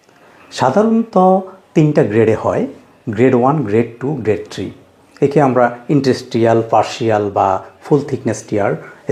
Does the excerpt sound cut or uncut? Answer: uncut